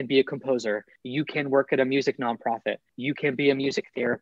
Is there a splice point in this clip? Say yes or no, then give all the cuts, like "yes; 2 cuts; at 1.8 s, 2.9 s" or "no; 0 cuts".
yes; 2 cuts; at 0.9 s, 2.9 s